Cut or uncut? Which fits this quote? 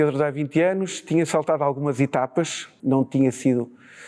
cut